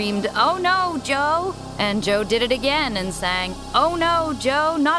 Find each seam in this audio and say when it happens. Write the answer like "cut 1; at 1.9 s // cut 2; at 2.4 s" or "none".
cut 1; at 1.6 s // cut 2; at 3.5 s

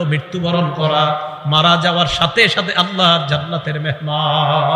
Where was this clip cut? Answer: none

